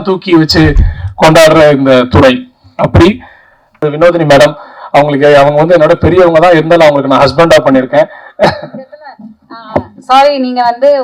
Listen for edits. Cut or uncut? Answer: cut